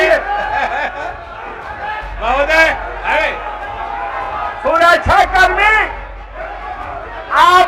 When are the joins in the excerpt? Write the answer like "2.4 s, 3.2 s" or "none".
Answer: none